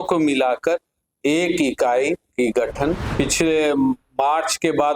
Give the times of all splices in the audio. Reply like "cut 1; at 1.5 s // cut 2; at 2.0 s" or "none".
cut 1; at 3.1 s